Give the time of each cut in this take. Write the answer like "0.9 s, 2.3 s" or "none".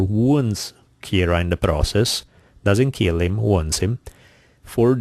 1.6 s